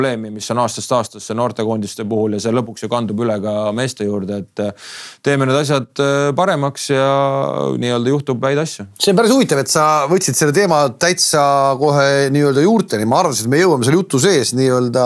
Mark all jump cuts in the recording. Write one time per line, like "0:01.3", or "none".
none